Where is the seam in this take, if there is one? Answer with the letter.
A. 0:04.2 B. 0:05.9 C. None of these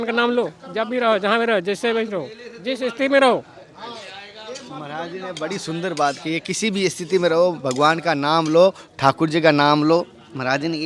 C